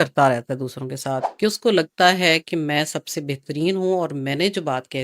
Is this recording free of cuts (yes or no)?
no